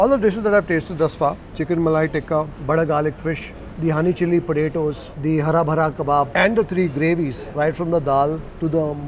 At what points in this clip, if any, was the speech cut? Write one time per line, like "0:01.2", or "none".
0:01.4